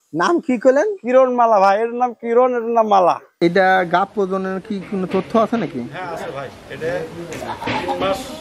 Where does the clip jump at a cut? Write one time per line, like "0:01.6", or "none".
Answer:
0:03.3

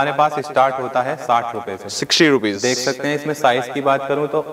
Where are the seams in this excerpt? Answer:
none

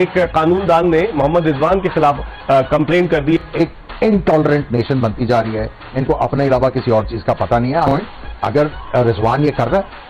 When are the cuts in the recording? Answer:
0:03.5
0:07.9

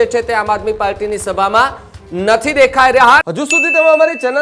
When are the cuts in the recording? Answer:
0:03.2

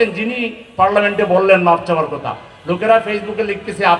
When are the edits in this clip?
none

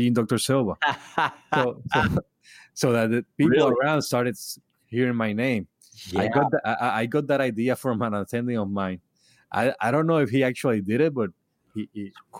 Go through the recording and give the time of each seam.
none

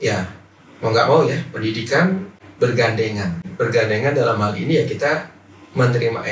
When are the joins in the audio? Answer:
0:02.3
0:03.5

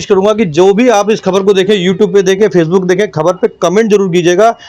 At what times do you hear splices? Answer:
none

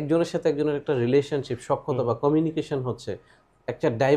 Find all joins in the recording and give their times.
none

